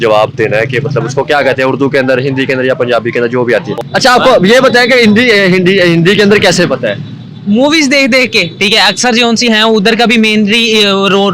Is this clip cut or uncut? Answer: cut